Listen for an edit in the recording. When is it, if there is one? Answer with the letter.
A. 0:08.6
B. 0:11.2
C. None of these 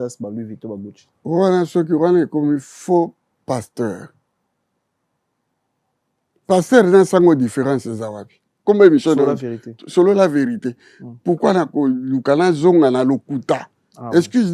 A